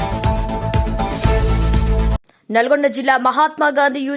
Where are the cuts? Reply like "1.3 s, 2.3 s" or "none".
2.3 s

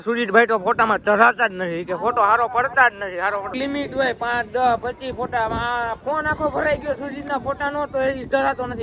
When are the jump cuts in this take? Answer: 1.8 s, 3.5 s

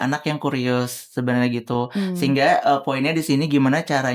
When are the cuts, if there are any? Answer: none

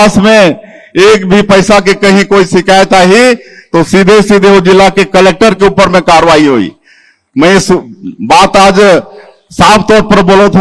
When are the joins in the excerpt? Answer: none

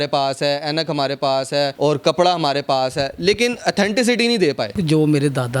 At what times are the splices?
1.7 s, 4.8 s

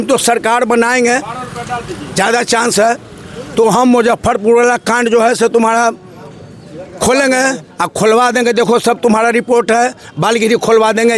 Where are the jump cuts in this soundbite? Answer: none

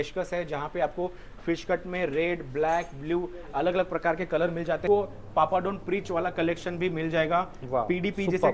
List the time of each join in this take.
4.8 s

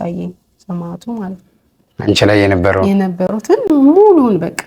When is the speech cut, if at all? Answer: none

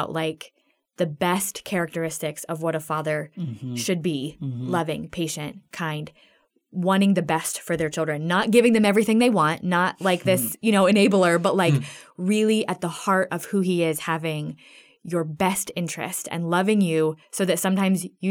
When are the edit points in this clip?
none

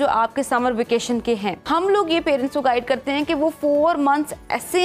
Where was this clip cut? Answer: 1.6 s

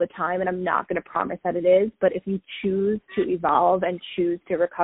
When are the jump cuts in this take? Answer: none

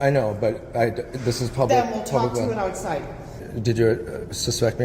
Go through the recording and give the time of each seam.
3.4 s

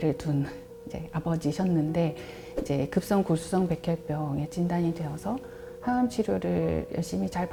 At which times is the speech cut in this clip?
none

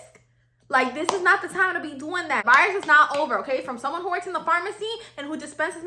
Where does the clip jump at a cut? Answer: 2.4 s

